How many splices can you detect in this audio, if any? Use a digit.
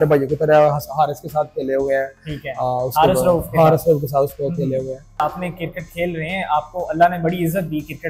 1